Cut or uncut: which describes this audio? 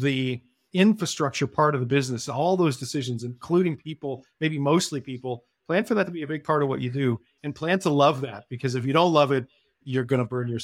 cut